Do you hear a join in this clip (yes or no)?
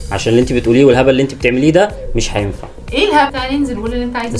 yes